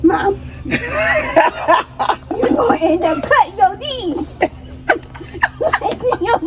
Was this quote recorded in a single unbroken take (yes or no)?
yes